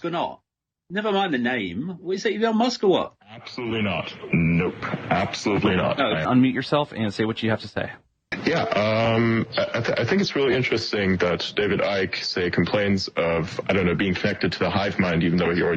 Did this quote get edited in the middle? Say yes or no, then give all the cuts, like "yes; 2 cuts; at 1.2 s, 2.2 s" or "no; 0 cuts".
yes; 1 cut; at 6.3 s